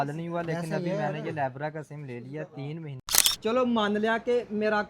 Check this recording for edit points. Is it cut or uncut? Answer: cut